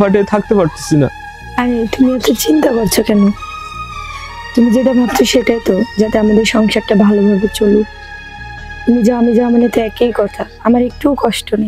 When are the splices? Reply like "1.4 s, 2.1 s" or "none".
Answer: none